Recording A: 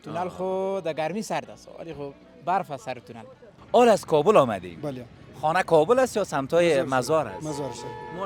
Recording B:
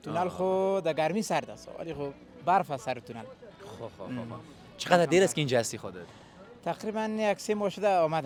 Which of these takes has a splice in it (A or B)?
A